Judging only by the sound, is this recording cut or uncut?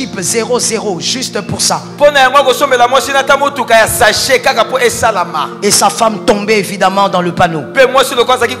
uncut